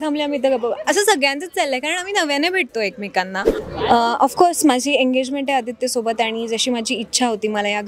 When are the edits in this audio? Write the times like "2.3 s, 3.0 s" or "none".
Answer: 3.6 s